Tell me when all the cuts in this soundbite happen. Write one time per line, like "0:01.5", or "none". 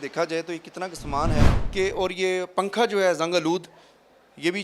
0:01.6